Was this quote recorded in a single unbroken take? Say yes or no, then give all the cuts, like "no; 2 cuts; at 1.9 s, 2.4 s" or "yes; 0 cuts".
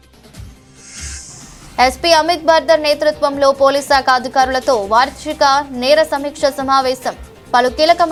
yes; 0 cuts